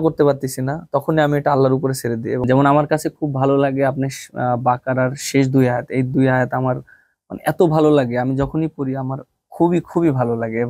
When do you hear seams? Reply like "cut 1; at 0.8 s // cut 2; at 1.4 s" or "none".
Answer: cut 1; at 2.4 s